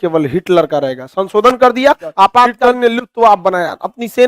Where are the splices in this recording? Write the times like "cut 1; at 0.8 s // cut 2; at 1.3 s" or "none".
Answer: cut 1; at 2.5 s